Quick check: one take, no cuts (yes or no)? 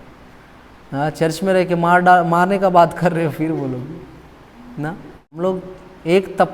no